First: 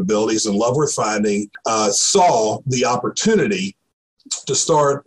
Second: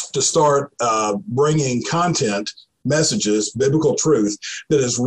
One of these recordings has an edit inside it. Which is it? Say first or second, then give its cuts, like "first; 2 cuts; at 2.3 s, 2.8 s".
first; 1 cut; at 1.5 s